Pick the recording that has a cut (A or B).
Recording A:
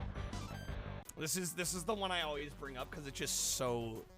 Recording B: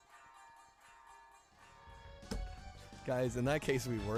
A